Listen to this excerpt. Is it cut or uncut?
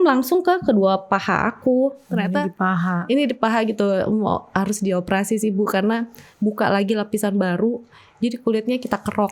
cut